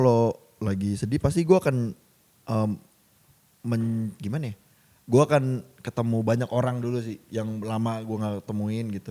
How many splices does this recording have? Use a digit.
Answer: 0